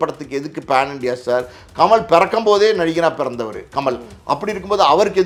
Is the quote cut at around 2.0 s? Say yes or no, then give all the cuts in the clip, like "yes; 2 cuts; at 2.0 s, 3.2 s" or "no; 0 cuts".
no; 0 cuts